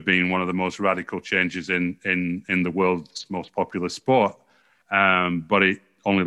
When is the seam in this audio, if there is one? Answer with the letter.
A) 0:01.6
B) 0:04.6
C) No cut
C